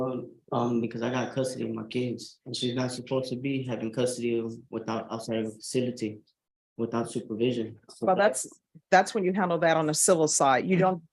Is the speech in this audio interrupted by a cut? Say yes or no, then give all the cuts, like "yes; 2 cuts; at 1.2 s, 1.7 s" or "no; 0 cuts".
no; 0 cuts